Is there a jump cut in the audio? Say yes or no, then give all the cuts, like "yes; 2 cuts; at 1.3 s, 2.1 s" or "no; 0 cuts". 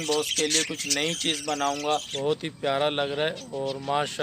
yes; 1 cut; at 2.1 s